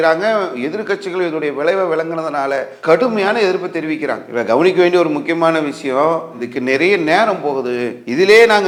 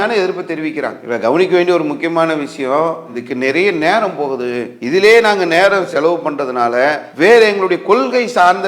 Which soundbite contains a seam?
second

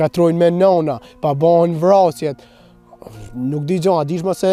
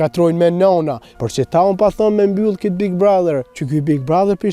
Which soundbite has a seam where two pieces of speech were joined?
second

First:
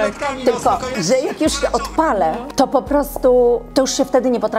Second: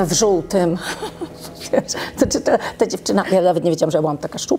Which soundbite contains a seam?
first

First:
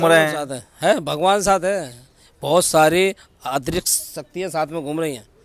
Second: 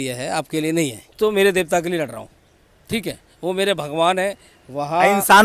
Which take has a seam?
second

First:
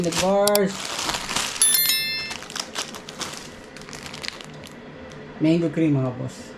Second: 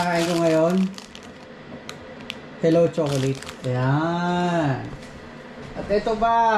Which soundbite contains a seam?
first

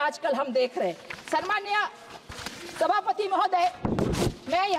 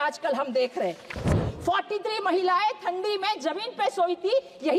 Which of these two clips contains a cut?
second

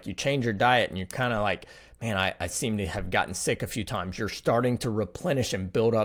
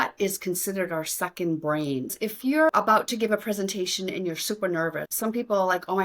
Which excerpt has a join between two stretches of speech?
second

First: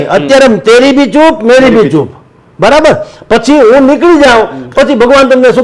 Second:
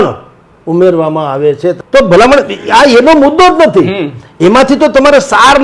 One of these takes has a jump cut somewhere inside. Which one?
second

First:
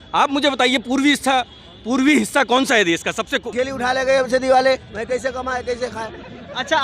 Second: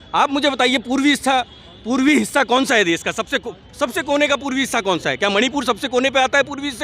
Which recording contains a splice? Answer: first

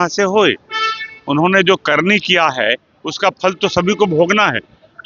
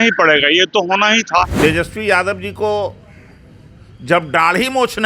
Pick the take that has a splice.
second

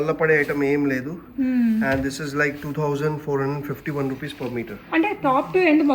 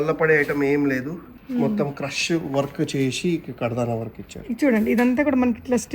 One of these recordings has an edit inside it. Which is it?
second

